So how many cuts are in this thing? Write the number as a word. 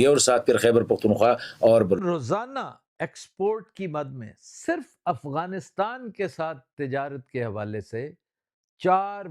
one